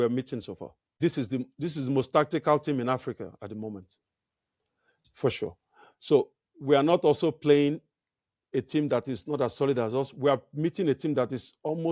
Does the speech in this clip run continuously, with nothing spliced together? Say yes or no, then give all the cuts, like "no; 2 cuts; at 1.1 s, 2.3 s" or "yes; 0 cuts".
yes; 0 cuts